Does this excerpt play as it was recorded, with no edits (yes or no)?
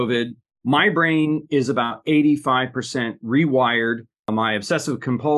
no